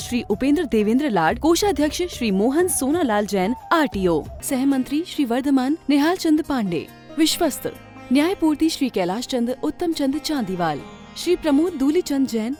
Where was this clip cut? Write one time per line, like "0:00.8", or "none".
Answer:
none